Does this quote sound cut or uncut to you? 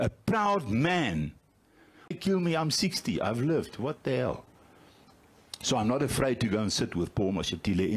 cut